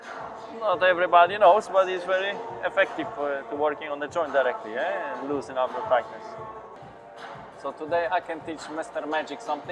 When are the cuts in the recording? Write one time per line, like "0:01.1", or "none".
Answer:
0:06.8